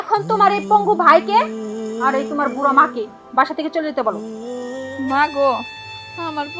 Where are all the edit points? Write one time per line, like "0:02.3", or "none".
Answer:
0:04.8